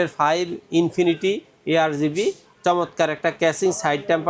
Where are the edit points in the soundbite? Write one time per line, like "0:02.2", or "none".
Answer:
none